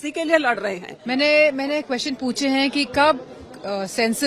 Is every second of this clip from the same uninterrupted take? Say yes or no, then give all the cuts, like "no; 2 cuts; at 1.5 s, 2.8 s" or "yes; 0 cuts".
no; 1 cut; at 0.9 s